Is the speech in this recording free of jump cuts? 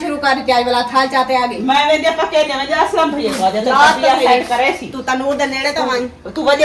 yes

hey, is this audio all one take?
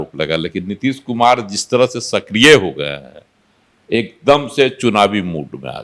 yes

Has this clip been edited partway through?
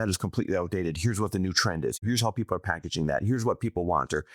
yes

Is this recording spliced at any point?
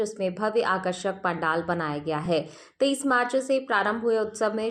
no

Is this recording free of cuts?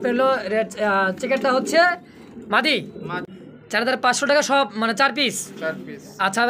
no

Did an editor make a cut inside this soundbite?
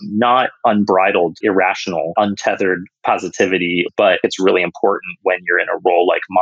yes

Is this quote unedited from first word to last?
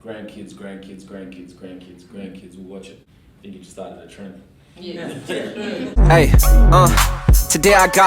no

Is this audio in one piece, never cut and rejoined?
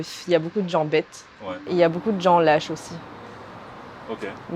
yes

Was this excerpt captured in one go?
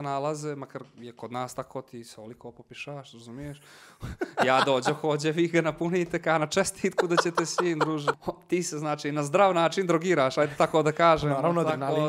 no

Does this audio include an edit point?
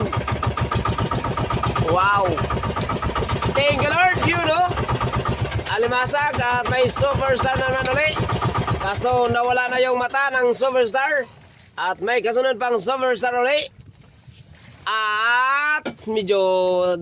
no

